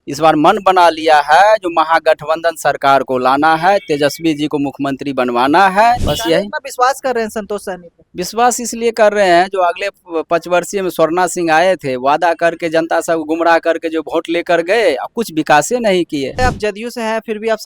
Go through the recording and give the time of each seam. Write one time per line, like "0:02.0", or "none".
0:06.1
0:16.4